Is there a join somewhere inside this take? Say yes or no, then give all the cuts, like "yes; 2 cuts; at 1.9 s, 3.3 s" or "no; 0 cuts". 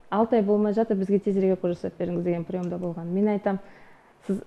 no; 0 cuts